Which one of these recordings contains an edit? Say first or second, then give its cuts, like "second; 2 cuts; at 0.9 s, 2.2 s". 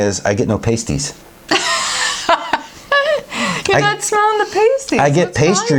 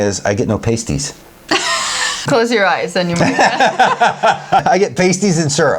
second; 2 cuts; at 2.2 s, 4.6 s